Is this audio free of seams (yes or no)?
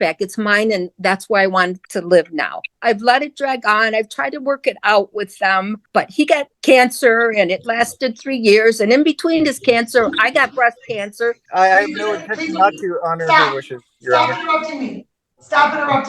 no